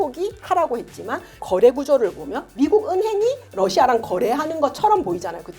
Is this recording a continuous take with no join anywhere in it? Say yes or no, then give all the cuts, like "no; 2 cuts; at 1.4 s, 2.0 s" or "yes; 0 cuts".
no; 2 cuts; at 1.4 s, 3.5 s